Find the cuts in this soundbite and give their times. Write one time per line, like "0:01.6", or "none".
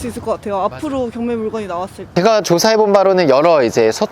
0:02.1